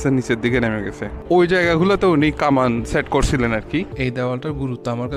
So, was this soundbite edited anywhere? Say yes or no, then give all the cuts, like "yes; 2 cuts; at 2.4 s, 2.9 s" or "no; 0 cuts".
yes; 2 cuts; at 1.2 s, 3.9 s